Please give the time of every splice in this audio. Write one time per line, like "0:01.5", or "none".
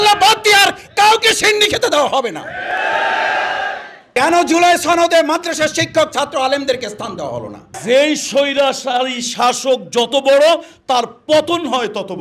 0:04.1
0:07.7